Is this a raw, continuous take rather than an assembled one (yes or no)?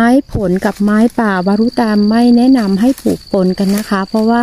yes